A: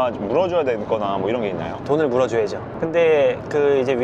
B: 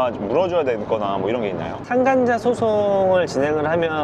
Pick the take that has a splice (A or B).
A